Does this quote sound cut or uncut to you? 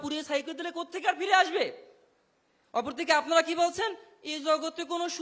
uncut